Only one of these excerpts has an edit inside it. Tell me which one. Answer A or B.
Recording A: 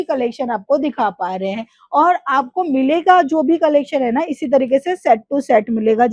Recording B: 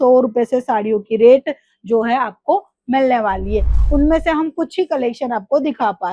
B